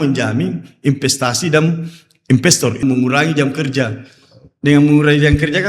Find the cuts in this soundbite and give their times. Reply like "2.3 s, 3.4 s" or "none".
2.8 s